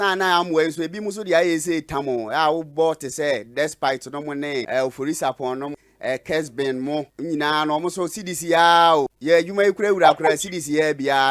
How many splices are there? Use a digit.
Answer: 4